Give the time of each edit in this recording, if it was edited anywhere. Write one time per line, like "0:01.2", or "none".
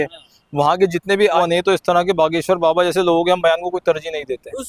0:01.4